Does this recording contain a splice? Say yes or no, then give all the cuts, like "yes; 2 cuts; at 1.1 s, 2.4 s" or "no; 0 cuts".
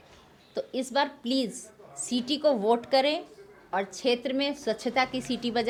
no; 0 cuts